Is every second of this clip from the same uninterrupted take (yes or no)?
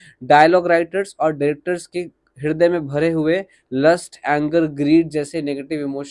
yes